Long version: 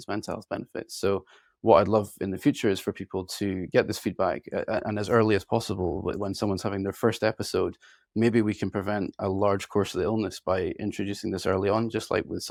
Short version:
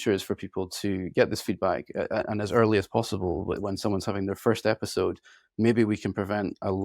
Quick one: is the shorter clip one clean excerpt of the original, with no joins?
yes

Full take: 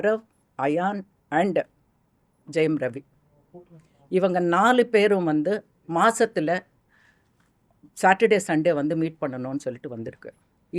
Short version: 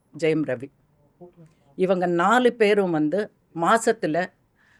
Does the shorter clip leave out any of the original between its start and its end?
no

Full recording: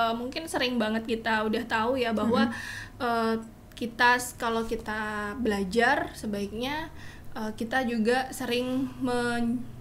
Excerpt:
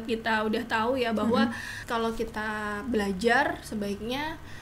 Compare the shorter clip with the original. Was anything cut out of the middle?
yes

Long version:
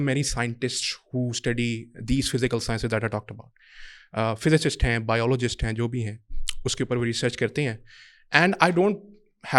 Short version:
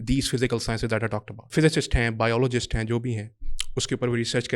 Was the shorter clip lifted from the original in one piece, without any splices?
no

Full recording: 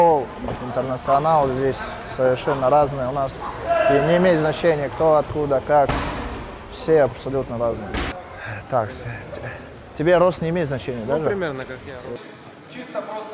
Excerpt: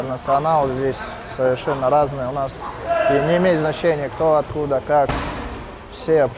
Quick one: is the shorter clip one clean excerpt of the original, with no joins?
yes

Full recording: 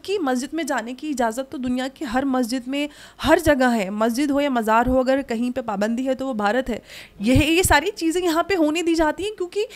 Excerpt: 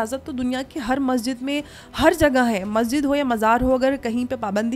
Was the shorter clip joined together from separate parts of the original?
no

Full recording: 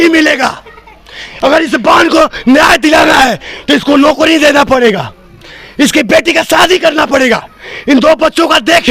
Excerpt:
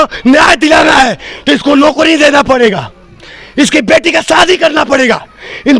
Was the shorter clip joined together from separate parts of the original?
no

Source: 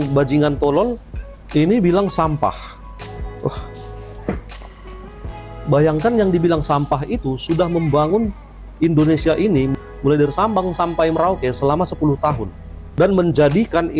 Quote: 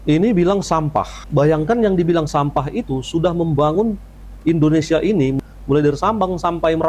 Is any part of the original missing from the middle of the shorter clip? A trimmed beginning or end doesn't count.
yes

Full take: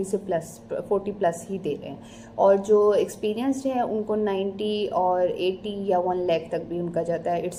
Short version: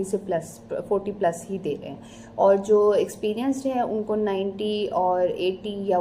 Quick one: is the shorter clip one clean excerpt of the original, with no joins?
yes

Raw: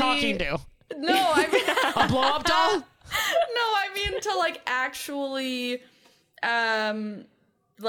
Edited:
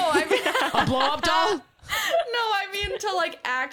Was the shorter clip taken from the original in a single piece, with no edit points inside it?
yes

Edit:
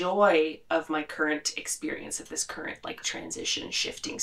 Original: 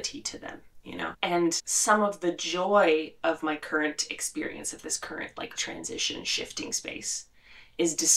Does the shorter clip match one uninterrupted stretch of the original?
yes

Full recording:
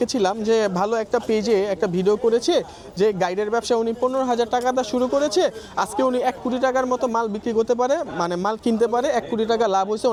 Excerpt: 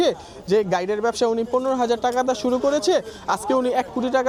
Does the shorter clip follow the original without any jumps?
yes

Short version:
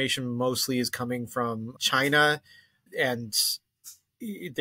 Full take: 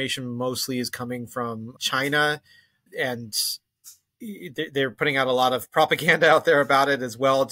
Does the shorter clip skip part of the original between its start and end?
no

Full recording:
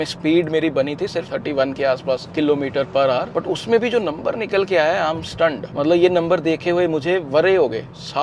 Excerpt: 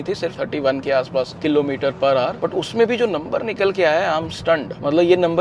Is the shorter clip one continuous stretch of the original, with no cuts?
yes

